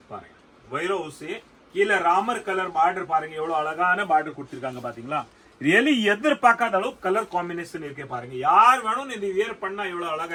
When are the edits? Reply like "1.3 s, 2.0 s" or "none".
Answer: none